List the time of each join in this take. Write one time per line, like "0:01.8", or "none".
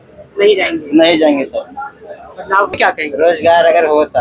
0:02.7